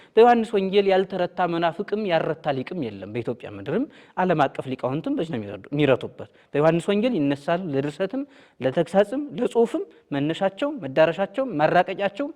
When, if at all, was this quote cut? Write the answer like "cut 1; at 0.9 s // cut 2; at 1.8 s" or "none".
none